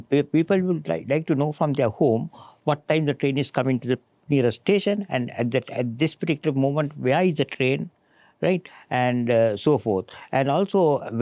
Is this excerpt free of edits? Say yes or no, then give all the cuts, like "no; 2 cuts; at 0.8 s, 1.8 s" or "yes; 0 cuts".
yes; 0 cuts